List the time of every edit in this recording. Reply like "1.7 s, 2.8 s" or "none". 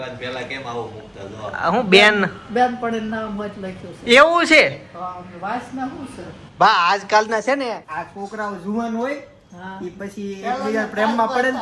none